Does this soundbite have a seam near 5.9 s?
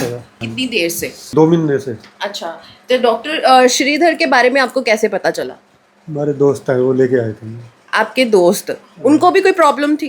no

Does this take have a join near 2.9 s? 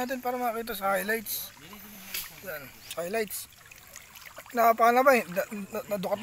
yes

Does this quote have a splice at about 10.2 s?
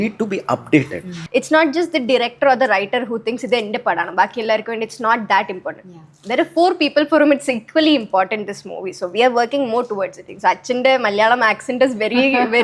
yes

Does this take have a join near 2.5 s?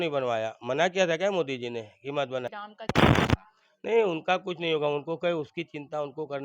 yes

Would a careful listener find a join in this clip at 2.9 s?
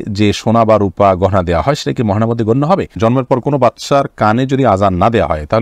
yes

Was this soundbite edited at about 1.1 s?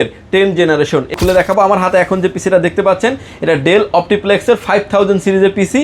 yes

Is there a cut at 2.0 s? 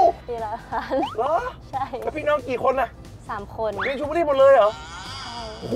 no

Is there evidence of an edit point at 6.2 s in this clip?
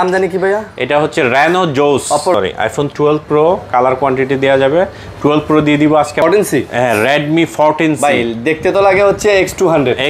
yes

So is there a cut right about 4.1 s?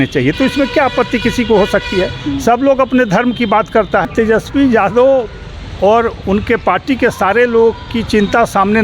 yes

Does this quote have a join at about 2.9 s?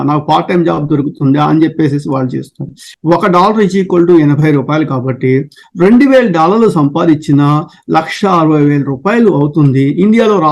yes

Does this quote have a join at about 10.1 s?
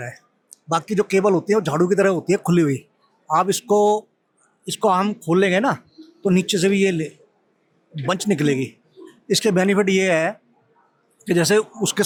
no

